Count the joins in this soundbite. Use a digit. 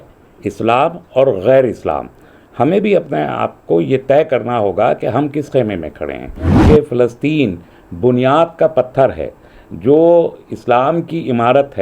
1